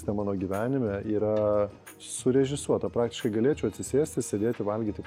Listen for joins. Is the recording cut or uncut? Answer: uncut